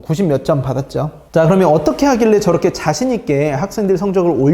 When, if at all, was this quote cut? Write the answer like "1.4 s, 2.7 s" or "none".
1.2 s